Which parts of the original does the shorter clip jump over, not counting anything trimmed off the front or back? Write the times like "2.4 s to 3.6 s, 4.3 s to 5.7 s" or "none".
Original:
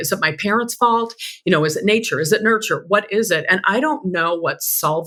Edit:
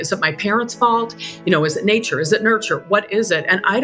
none